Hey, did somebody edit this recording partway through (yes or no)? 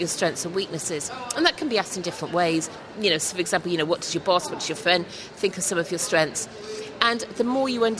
no